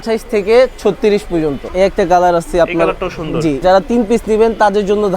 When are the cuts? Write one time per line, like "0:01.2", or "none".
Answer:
0:01.6
0:03.6